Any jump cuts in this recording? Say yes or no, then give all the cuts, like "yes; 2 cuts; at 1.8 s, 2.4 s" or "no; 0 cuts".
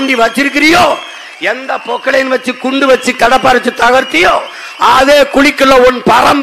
no; 0 cuts